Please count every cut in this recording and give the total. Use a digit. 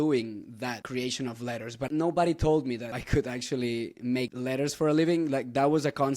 4